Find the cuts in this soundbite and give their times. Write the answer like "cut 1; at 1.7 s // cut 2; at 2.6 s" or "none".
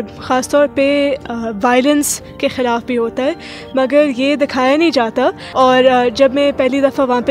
cut 1; at 5.4 s